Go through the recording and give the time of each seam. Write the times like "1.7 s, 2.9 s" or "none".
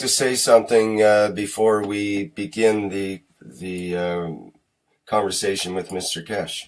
5.7 s